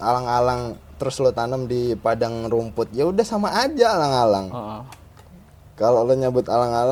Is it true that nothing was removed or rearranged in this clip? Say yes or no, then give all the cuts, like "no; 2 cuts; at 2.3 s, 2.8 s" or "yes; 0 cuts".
yes; 0 cuts